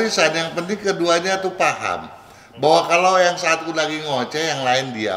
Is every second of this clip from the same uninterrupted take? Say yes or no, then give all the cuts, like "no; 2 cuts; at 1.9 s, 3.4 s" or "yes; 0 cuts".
yes; 0 cuts